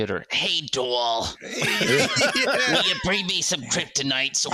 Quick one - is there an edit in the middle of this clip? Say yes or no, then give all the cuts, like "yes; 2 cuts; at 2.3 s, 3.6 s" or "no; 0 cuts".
no; 0 cuts